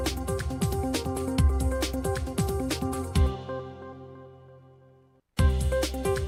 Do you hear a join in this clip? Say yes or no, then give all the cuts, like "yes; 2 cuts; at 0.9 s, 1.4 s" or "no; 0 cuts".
no; 0 cuts